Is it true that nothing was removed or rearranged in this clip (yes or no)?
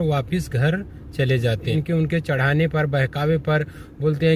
no